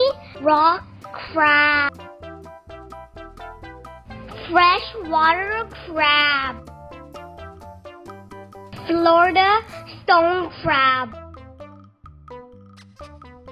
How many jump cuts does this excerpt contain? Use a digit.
0